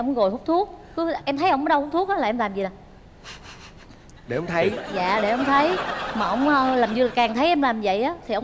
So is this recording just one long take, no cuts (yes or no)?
yes